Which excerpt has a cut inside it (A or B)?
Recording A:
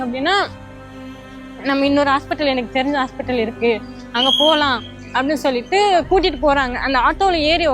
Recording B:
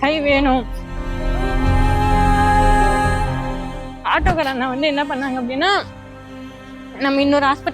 B